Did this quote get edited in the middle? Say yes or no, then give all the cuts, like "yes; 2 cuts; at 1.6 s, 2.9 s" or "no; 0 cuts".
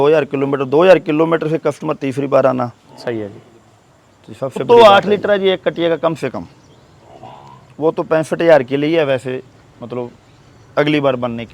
yes; 1 cut; at 4.6 s